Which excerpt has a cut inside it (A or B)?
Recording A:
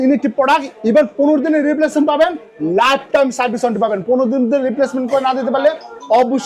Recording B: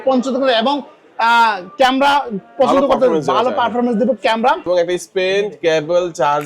B